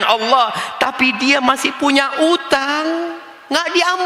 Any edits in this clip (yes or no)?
no